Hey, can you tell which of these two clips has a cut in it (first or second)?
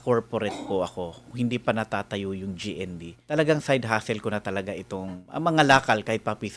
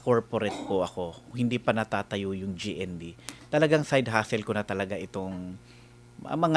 first